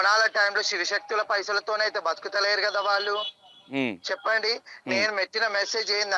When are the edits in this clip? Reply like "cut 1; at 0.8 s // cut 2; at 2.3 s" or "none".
none